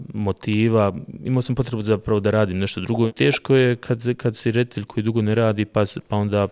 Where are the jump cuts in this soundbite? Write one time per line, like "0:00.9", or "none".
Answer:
0:03.1